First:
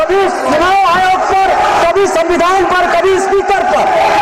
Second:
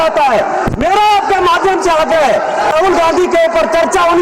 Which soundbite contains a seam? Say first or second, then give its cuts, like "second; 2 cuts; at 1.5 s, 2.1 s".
second; 1 cut; at 2.7 s